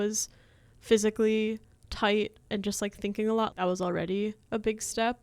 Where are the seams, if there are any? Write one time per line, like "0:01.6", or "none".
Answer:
0:03.5